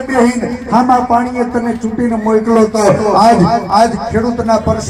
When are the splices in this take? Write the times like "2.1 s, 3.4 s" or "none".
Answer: none